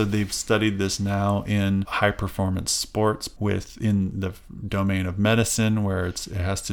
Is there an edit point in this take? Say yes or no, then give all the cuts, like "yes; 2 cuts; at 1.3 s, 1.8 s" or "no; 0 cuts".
yes; 2 cuts; at 1.9 s, 3.3 s